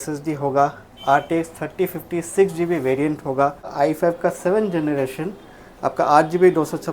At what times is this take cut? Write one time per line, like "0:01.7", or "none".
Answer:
0:03.7